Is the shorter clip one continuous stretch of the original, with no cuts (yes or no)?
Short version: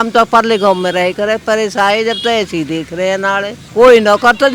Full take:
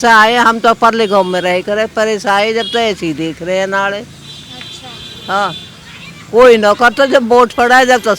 no